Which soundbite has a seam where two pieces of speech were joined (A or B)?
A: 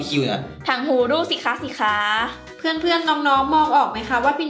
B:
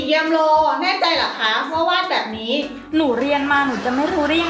A